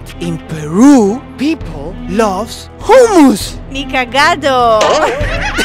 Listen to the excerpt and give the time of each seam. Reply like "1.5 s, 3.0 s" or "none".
none